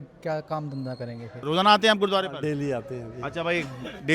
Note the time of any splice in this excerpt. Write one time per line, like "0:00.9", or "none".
0:01.3